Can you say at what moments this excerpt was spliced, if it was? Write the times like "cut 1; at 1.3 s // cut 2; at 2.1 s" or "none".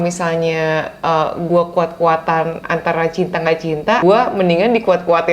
cut 1; at 4.0 s